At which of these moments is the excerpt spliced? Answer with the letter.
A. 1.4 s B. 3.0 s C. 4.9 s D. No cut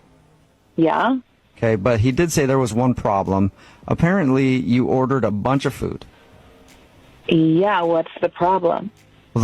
A